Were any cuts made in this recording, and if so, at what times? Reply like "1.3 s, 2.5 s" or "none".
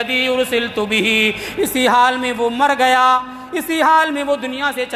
none

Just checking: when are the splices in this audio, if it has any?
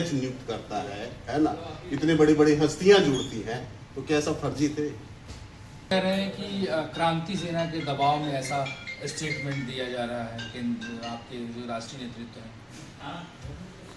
5.9 s

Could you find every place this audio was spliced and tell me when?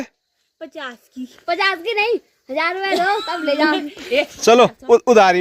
none

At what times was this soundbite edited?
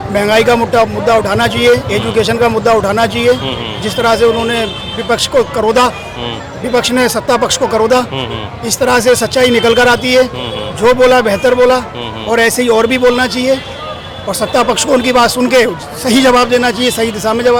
none

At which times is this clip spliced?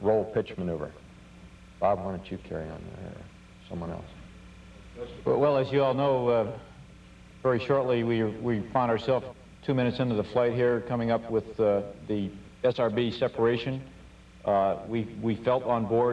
10.9 s

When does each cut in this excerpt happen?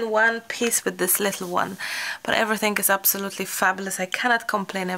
none

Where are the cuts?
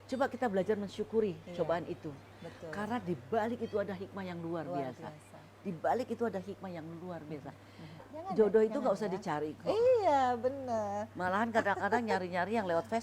8.1 s

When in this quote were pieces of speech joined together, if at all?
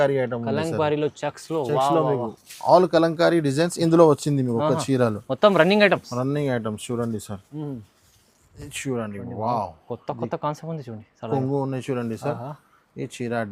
none

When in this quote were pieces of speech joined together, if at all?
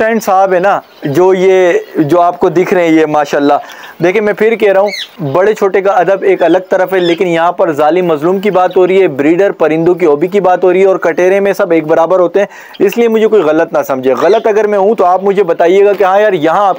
none

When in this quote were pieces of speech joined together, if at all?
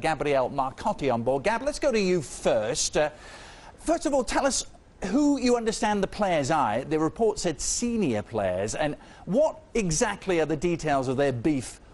4.7 s

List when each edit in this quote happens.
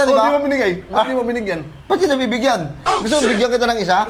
none

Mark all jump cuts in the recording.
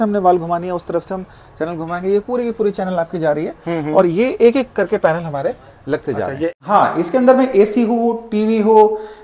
6.5 s

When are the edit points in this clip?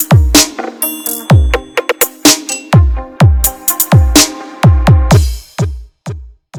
none

